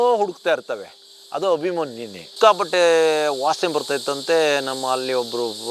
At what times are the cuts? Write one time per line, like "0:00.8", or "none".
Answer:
0:02.2